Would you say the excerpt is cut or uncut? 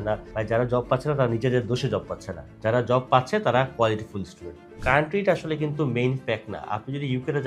cut